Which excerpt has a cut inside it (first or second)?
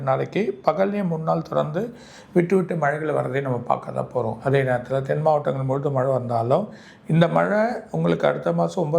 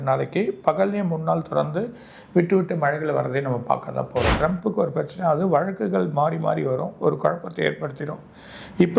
second